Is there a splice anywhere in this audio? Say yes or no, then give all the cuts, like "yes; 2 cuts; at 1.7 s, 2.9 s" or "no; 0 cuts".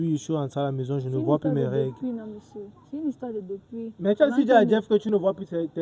no; 0 cuts